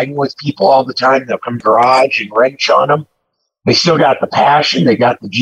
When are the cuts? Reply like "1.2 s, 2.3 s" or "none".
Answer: 1.5 s